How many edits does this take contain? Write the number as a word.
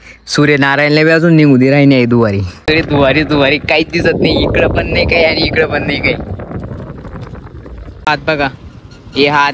two